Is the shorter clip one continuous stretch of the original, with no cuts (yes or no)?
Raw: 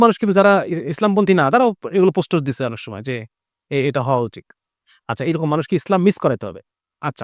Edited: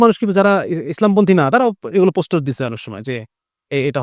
yes